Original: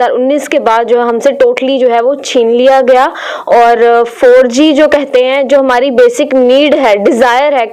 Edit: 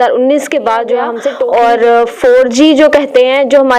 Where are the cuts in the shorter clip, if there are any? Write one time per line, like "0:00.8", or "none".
0:01.4